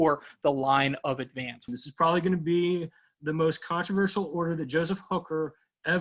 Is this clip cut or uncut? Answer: cut